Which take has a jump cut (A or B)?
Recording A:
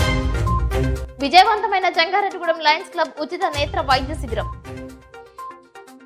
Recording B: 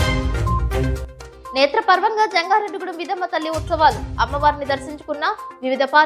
B